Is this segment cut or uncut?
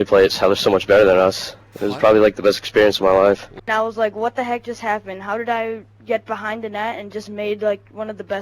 cut